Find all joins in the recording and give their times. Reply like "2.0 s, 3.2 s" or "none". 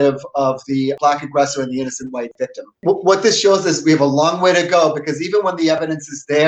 1.0 s, 2.8 s